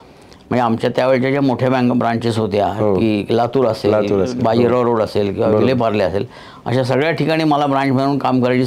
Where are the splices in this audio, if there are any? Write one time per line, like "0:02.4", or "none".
none

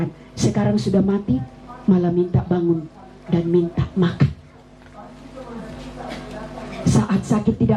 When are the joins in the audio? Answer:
none

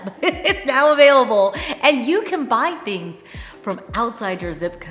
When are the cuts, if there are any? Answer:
none

